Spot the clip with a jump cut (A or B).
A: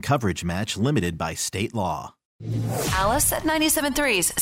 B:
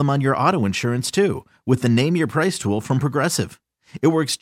A